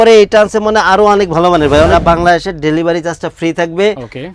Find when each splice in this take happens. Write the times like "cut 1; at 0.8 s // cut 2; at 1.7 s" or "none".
cut 1; at 1.9 s

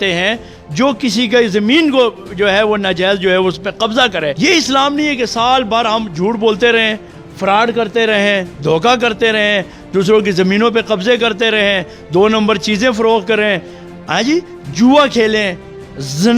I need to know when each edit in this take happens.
cut 1; at 4.3 s

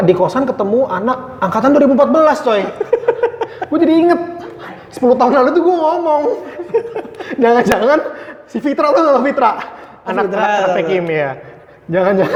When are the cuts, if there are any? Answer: none

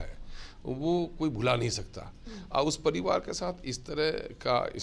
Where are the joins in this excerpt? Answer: none

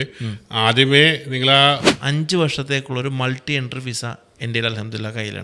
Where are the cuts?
cut 1; at 1.9 s

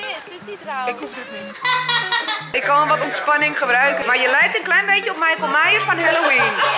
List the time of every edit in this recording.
cut 1; at 1.4 s // cut 2; at 2.6 s // cut 3; at 4.0 s

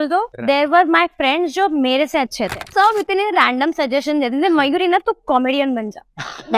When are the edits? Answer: cut 1; at 2.7 s

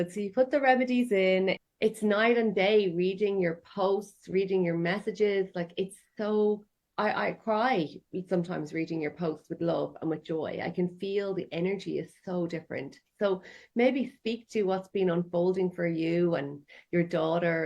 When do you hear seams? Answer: cut 1; at 1.6 s // cut 2; at 6.8 s

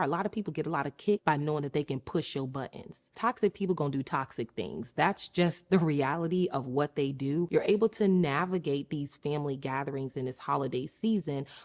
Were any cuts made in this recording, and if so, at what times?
cut 1; at 1.2 s // cut 2; at 3.1 s // cut 3; at 7.5 s

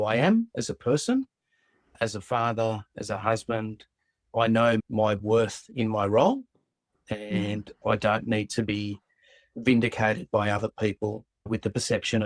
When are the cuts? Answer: none

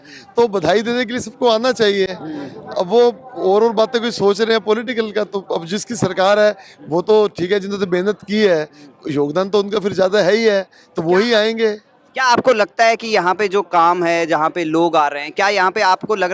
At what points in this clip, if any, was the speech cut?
none

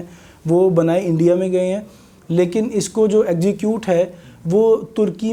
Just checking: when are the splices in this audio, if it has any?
none

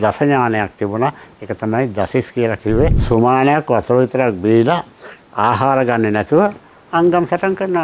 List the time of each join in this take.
cut 1; at 3.0 s

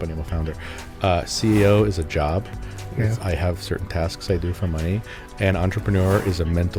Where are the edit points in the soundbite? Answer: none

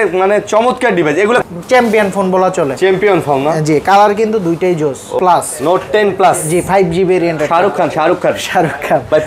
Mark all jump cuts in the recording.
cut 1; at 1.4 s // cut 2; at 5.1 s

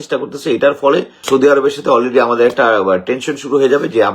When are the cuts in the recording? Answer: cut 1; at 1.2 s

